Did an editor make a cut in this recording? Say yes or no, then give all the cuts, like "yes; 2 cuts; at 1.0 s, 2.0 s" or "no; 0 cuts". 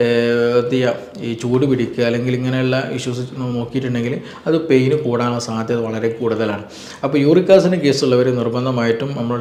no; 0 cuts